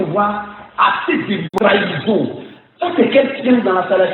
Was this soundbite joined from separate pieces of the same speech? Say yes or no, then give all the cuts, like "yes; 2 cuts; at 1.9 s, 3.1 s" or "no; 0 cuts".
yes; 1 cut; at 1.5 s